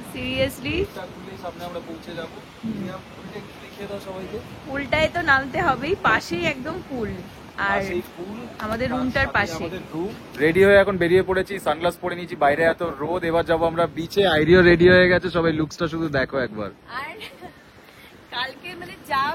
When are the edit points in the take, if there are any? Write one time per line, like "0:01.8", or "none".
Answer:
0:10.4